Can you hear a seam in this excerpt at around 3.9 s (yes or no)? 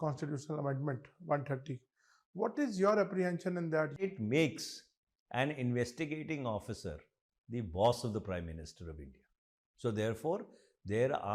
yes